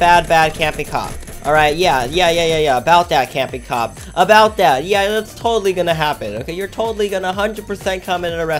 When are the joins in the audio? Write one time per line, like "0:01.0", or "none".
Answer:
none